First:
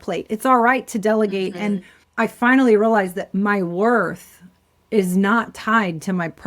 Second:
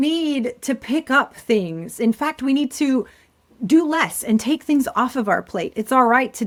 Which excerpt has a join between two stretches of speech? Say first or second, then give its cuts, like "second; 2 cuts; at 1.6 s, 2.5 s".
first; 1 cut; at 2.0 s